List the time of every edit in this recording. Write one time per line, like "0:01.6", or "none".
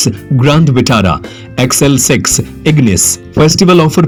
none